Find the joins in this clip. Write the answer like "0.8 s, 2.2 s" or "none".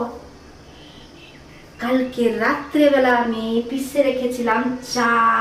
none